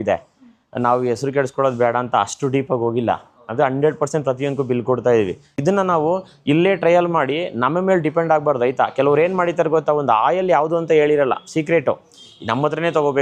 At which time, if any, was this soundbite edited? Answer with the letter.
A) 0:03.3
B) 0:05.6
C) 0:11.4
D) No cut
B